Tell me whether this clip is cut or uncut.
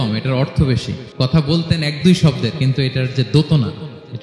cut